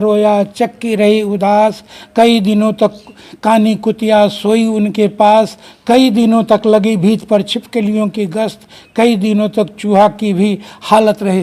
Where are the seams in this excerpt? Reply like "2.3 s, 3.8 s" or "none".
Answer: none